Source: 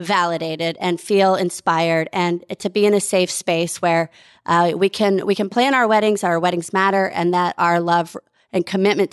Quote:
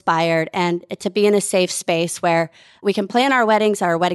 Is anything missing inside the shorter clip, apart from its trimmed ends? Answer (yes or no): yes